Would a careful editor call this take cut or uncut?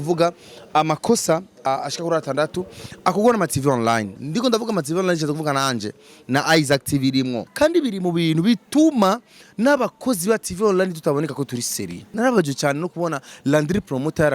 cut